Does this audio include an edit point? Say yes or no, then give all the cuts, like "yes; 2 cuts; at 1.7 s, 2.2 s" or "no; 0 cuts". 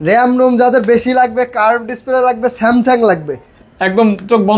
no; 0 cuts